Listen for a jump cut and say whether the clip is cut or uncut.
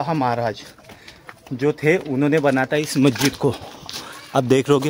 uncut